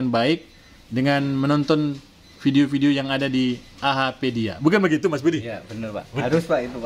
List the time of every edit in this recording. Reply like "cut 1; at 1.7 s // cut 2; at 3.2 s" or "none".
none